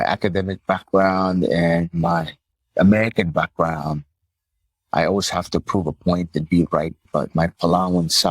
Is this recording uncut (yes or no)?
no